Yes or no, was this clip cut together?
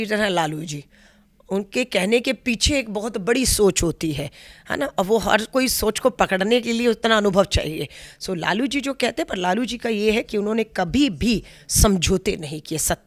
no